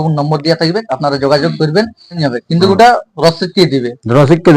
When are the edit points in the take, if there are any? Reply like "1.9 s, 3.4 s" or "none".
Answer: 2.2 s